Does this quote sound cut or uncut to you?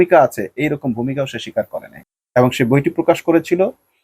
uncut